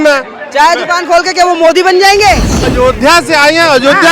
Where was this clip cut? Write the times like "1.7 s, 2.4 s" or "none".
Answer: 2.6 s